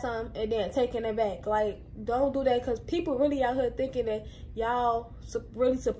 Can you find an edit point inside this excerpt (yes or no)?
no